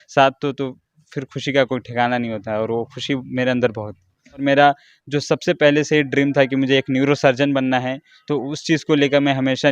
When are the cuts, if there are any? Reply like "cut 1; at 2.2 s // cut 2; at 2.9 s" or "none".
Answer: cut 1; at 4.4 s